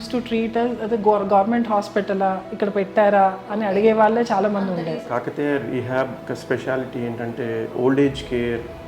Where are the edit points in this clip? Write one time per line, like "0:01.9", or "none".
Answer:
0:04.8
0:06.2
0:07.7